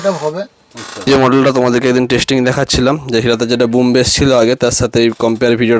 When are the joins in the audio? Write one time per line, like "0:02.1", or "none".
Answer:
0:01.1